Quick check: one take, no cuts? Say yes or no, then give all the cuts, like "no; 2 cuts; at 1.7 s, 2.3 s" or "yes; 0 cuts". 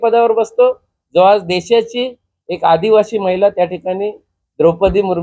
yes; 0 cuts